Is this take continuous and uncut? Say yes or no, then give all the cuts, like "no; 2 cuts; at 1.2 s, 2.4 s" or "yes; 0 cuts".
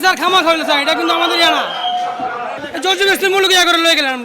no; 1 cut; at 2.6 s